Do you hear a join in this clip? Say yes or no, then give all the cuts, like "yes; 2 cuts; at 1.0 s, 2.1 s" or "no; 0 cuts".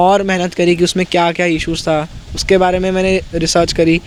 no; 0 cuts